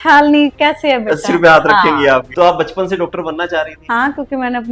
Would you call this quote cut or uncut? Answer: cut